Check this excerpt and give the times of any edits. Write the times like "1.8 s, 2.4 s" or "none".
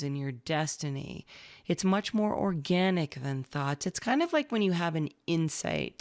none